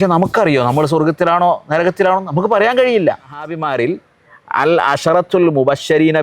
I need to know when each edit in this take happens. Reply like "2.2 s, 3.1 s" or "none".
3.6 s